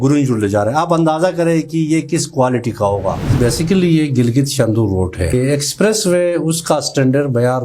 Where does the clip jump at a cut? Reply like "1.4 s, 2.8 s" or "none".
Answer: 3.4 s, 5.3 s